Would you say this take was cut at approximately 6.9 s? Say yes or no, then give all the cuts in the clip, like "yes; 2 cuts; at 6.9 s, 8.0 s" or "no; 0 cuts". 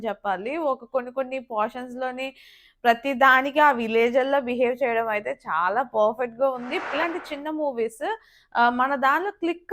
yes; 1 cut; at 6.9 s